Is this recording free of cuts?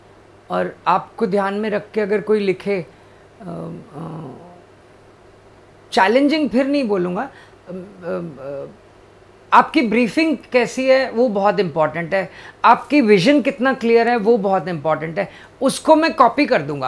yes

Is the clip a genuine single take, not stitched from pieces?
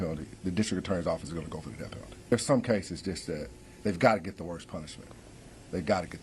no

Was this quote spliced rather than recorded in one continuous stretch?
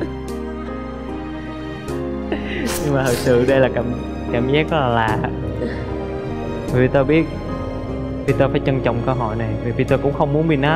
no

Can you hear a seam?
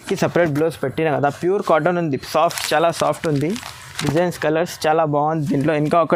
no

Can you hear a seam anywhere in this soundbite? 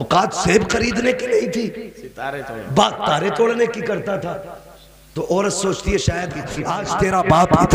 yes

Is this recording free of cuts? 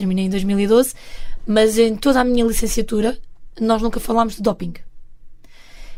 yes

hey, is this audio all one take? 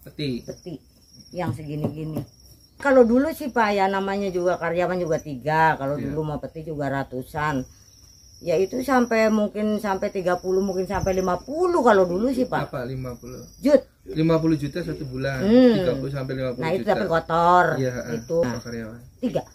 no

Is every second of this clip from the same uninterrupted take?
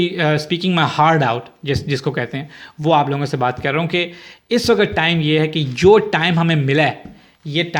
yes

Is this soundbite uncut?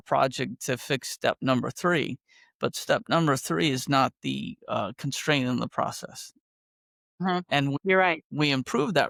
yes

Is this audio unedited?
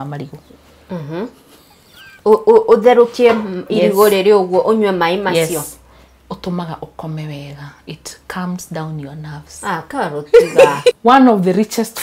no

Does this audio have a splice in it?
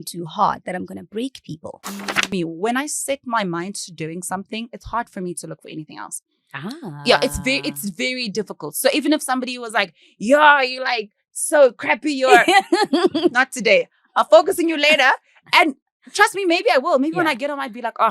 yes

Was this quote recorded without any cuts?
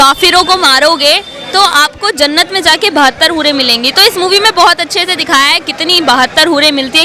yes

